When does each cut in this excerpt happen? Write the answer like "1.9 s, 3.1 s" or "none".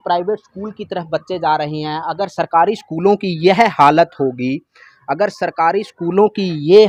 none